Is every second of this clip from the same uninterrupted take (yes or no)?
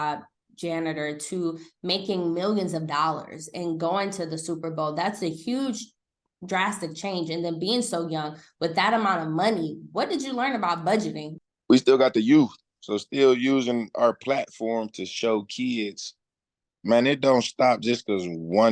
no